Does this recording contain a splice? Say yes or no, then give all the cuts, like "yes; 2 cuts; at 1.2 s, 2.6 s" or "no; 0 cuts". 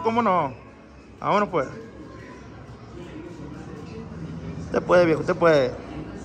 no; 0 cuts